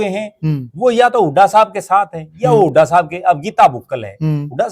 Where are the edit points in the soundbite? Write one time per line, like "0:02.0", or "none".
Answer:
none